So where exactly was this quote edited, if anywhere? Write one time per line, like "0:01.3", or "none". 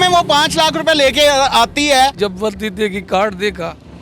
0:02.1